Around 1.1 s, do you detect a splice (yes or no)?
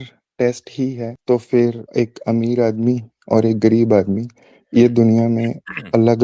yes